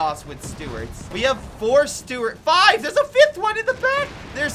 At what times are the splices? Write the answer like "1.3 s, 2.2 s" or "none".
1.0 s